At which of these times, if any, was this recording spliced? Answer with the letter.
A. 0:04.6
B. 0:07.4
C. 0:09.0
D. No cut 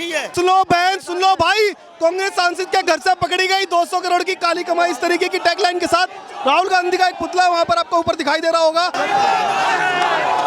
C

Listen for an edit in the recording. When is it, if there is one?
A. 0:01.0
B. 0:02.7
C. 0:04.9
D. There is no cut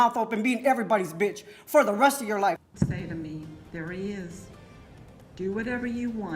B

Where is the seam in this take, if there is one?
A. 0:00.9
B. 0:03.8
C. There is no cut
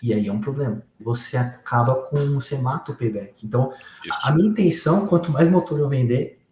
A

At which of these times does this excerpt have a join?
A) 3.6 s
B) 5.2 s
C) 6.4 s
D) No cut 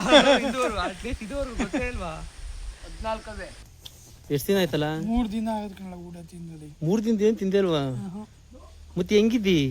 A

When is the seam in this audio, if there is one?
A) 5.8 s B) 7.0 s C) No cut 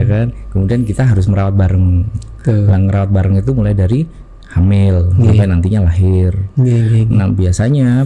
C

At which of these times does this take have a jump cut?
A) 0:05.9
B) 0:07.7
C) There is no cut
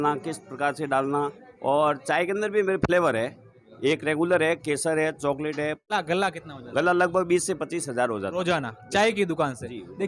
A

